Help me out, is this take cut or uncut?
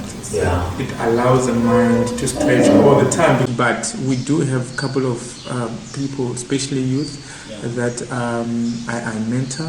cut